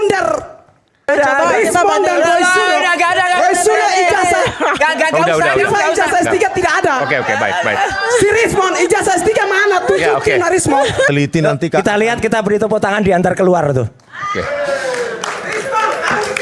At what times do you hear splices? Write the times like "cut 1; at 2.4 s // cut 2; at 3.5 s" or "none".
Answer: cut 1; at 1.1 s // cut 2; at 11.1 s

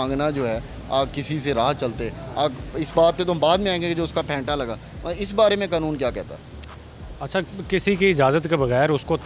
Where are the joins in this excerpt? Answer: none

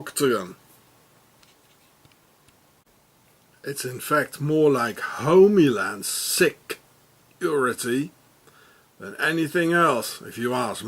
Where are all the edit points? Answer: cut 1; at 8.4 s

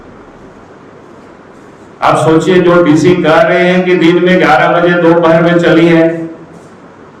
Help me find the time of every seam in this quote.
none

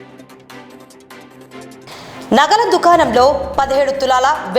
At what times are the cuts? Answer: cut 1; at 1.4 s

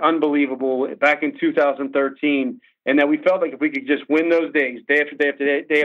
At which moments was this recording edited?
none

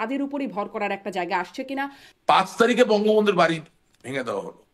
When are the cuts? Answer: cut 1; at 2.1 s

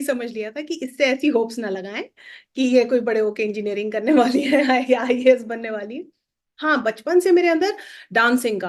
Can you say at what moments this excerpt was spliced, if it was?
none

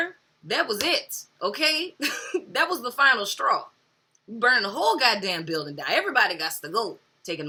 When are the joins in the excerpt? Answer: none

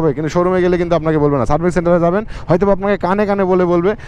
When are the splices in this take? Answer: none

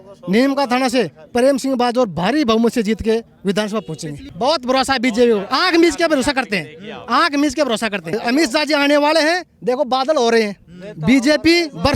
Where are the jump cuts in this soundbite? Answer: cut 1; at 4.2 s // cut 2; at 8.2 s

